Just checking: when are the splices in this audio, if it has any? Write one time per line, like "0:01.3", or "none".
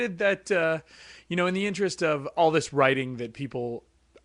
none